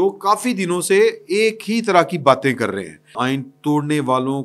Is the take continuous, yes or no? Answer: no